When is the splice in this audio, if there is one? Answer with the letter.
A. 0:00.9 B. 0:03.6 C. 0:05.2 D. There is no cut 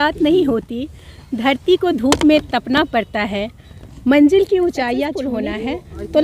C